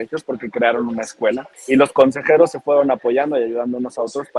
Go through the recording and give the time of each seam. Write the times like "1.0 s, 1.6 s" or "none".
1.5 s